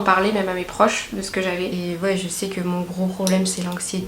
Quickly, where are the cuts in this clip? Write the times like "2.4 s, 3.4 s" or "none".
1.7 s